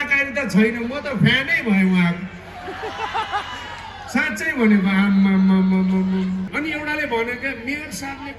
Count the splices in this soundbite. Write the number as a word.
one